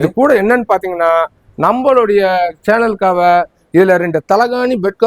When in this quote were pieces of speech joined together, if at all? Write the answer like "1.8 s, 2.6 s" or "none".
none